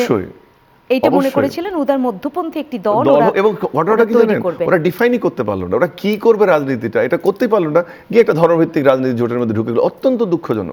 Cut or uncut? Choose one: uncut